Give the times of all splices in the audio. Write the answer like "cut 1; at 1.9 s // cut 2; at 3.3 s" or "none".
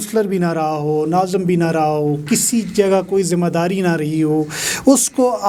none